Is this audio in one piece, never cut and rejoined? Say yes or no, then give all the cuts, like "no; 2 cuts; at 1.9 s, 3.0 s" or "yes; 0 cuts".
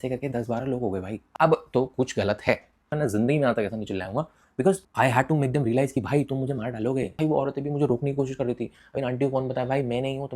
no; 3 cuts; at 1.2 s, 2.9 s, 7.1 s